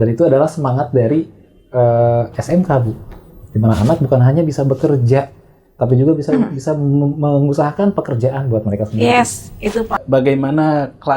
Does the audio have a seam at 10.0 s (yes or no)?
yes